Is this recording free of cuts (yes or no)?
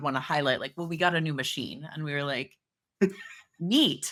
yes